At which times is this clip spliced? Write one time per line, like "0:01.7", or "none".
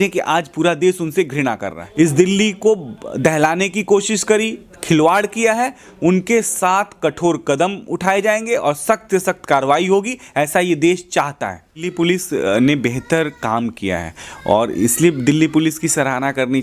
0:01.8
0:11.9